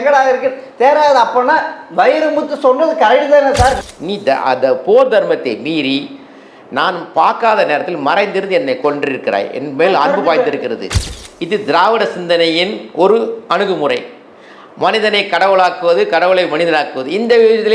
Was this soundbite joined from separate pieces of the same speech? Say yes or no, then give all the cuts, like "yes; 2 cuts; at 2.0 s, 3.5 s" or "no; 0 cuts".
yes; 2 cuts; at 3.9 s, 11.0 s